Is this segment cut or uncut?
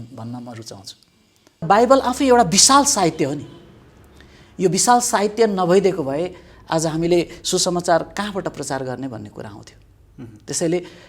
cut